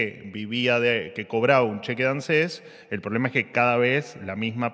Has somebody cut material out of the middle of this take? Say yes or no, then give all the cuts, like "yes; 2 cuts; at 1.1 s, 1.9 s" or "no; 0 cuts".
no; 0 cuts